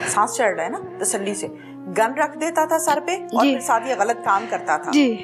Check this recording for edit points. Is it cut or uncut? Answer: uncut